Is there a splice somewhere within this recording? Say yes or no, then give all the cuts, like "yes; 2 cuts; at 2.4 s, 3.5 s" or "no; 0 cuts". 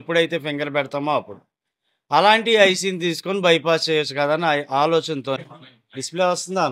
yes; 1 cut; at 5.4 s